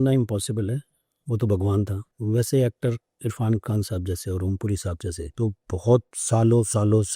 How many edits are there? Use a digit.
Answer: 3